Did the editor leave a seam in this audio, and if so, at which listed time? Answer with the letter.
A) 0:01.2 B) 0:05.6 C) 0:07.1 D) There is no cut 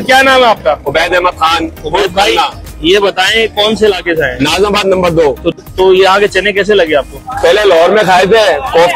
B